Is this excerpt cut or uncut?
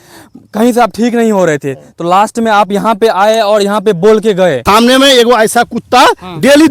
cut